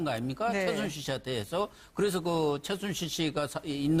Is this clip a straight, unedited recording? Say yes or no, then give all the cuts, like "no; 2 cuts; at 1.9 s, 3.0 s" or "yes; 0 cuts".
yes; 0 cuts